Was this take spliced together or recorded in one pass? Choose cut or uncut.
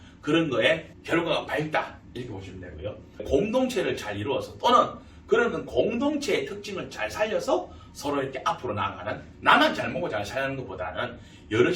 cut